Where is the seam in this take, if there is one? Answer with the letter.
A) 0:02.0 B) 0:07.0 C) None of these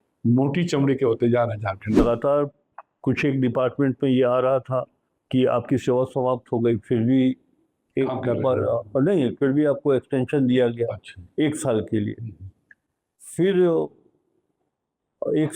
A